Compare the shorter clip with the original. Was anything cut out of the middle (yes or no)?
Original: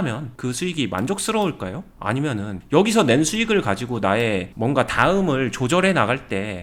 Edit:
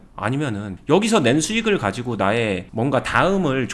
no